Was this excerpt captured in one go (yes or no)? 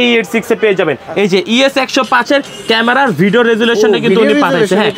no